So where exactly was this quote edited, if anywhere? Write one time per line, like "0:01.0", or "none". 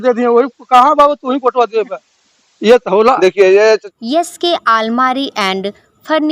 0:03.9